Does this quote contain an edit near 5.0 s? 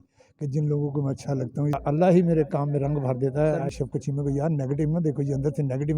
no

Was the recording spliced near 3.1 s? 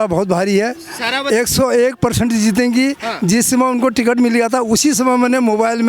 no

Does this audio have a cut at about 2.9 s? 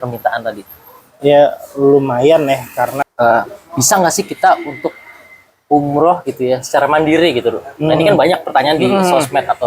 yes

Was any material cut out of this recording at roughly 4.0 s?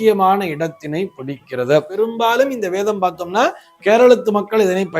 no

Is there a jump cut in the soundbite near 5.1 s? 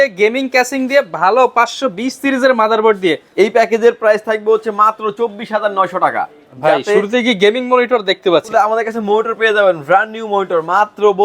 no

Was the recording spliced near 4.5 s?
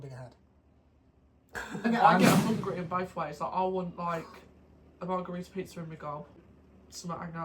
no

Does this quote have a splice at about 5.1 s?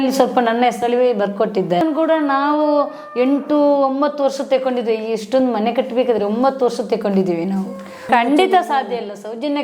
no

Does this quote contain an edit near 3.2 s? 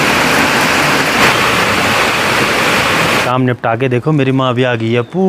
yes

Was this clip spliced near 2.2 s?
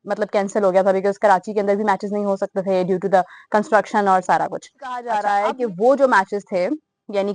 no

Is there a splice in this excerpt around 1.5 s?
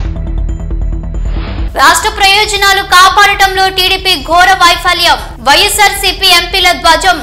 yes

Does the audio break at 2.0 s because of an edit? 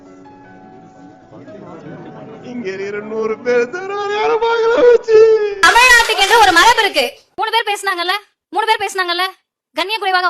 no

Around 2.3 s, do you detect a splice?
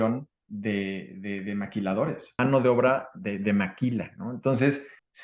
no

